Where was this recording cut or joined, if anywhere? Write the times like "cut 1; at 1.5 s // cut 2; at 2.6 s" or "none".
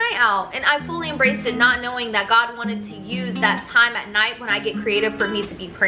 none